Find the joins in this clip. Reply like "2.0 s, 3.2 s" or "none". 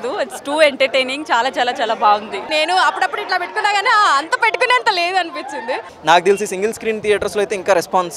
2.5 s, 5.9 s